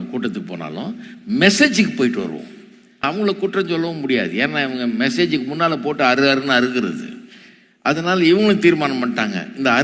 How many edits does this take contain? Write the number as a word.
one